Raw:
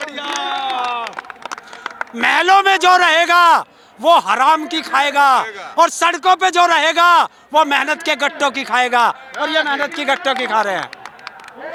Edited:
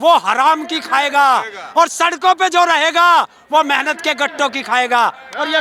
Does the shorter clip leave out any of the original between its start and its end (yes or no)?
no